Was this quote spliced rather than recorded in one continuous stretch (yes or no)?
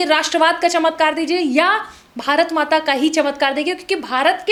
no